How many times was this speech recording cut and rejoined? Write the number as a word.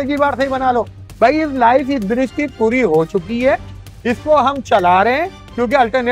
zero